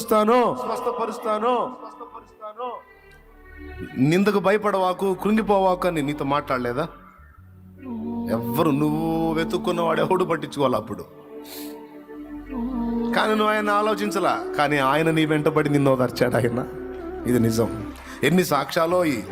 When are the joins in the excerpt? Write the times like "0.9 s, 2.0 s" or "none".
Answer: none